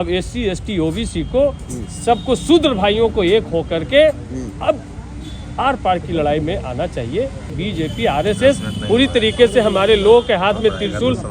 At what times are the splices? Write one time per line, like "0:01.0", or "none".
0:07.5